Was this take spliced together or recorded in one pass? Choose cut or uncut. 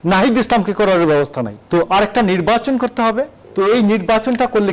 cut